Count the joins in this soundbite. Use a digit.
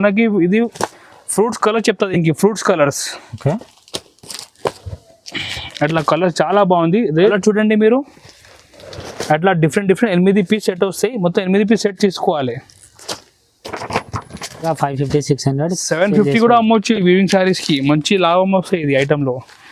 2